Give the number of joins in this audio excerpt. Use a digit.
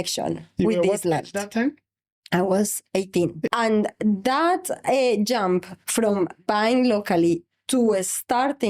1